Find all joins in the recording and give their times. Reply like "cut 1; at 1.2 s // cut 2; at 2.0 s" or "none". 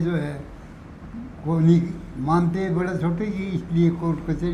none